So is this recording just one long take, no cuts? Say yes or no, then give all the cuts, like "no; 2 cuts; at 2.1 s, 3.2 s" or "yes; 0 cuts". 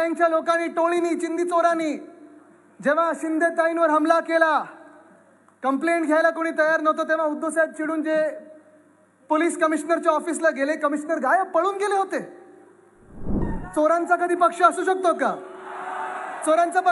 no; 1 cut; at 13.4 s